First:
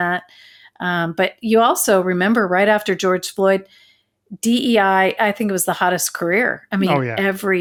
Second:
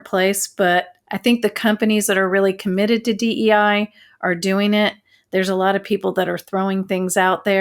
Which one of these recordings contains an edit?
second; 1 cut; at 1.0 s

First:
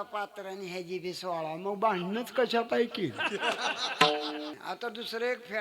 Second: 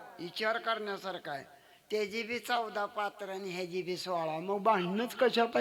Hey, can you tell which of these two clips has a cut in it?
first; 1 cut; at 4.6 s

